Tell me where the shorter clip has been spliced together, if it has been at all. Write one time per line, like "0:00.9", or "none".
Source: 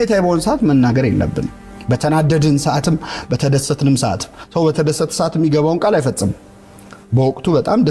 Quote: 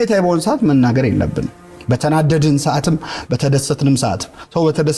none